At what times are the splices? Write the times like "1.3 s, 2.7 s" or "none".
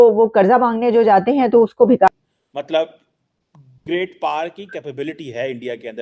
2.1 s

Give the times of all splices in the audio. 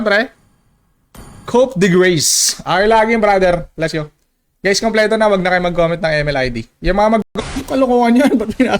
7.6 s

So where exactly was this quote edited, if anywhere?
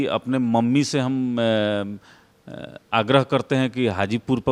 none

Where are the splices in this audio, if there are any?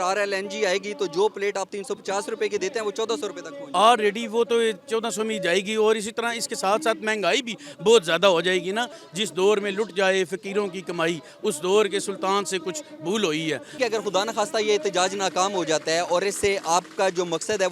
9.0 s, 13.7 s

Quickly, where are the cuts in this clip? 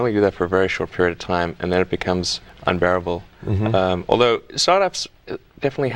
none

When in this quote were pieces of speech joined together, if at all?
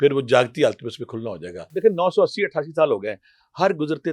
1.6 s

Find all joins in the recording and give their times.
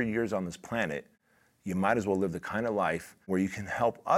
3.2 s

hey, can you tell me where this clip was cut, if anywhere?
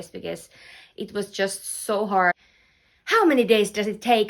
2.3 s

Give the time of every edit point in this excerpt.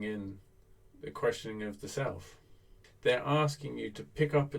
2.8 s

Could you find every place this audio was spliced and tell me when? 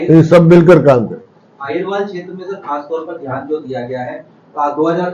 none

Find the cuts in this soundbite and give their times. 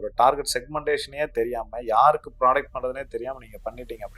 none

